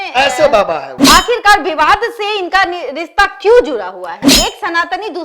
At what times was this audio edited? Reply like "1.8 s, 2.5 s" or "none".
1.0 s, 4.3 s

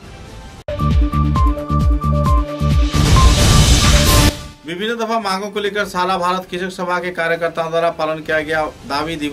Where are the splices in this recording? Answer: 4.4 s

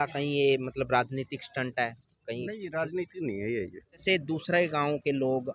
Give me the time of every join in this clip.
4.0 s

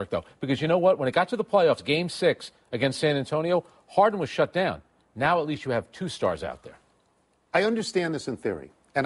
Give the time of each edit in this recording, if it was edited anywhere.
5.5 s

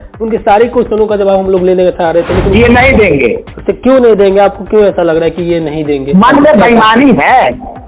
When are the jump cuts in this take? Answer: 2.5 s

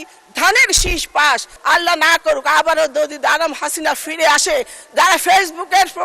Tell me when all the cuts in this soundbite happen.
1.5 s

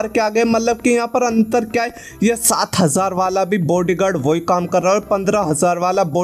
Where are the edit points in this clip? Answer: none

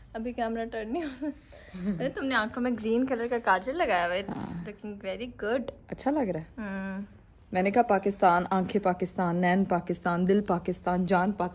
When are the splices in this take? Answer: none

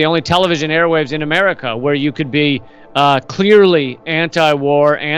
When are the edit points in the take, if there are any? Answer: none

